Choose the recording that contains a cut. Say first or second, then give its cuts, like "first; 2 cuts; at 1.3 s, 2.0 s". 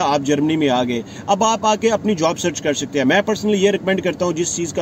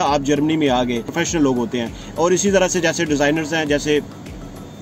second; 1 cut; at 1.1 s